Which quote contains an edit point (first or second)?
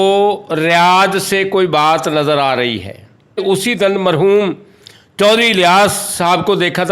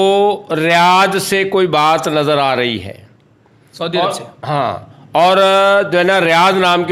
first